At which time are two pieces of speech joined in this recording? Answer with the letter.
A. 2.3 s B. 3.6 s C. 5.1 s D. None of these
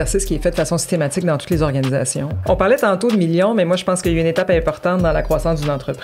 A